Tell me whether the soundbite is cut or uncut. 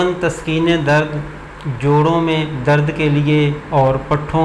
uncut